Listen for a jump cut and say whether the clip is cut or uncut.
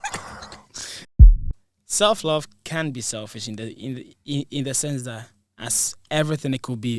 cut